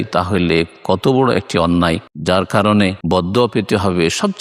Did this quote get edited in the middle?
yes; 2 cuts; at 2.1 s, 3.0 s

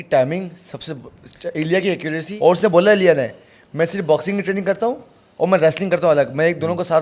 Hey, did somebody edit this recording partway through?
yes; 1 cut; at 2.2 s

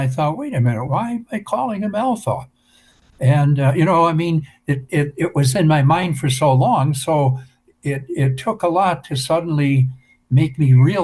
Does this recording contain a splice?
no; 0 cuts

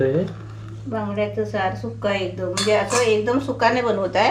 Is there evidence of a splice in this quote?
no; 0 cuts

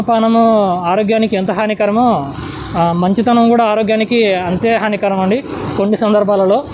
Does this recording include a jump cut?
no; 0 cuts

